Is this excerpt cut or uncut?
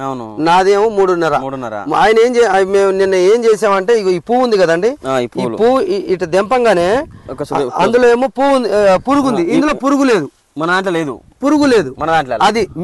uncut